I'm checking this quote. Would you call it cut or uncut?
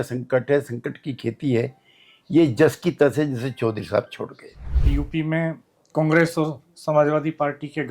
cut